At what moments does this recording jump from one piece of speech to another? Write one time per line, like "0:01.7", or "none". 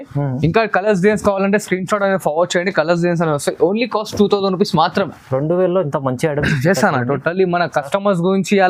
none